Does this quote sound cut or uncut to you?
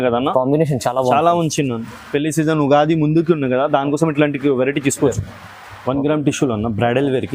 cut